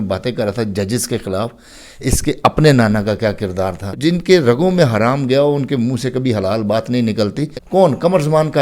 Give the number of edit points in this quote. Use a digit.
2